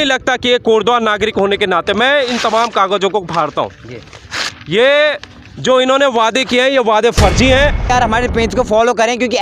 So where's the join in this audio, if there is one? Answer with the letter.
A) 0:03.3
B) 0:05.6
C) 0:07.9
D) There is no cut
C